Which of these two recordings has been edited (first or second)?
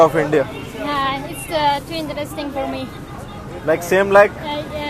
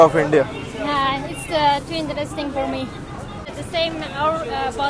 second